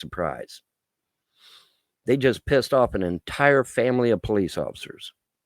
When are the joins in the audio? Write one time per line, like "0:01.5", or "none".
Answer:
none